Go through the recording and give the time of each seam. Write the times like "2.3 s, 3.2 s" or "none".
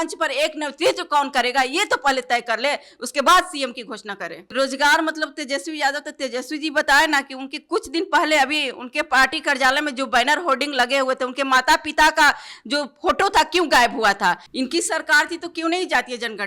4.5 s, 14.5 s